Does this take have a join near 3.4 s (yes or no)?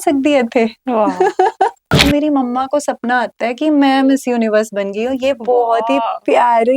no